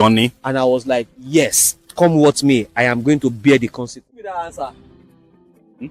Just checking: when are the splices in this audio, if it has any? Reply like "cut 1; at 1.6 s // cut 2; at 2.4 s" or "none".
cut 1; at 4.2 s